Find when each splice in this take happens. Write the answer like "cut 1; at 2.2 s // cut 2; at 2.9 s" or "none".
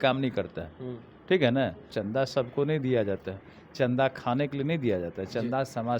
cut 1; at 1.9 s